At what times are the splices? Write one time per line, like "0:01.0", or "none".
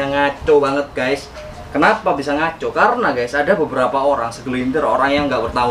none